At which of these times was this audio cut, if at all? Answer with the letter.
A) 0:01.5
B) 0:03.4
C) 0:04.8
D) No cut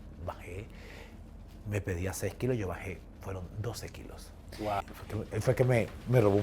C